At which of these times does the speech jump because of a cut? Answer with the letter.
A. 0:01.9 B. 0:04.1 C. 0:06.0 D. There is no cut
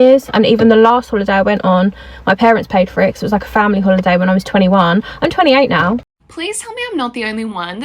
C